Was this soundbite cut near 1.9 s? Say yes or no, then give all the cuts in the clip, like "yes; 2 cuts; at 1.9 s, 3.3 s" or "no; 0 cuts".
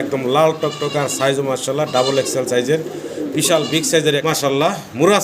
no; 1 cut; at 4.2 s